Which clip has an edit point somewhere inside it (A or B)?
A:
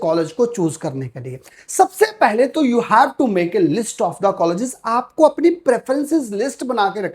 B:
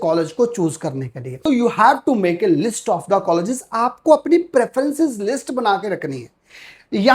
B